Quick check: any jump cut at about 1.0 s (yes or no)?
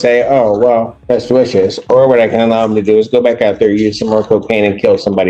yes